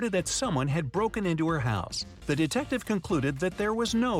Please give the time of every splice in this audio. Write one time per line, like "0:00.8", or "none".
0:02.0